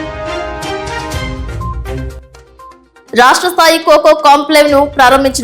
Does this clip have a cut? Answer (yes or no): yes